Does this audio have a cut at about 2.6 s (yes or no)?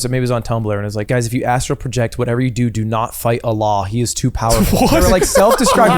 no